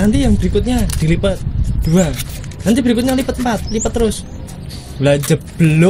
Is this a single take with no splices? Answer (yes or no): yes